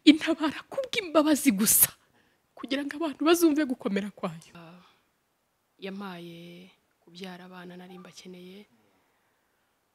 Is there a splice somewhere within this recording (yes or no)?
yes